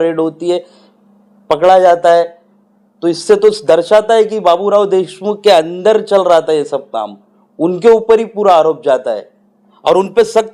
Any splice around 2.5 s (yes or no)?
no